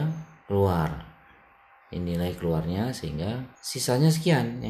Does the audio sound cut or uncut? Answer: uncut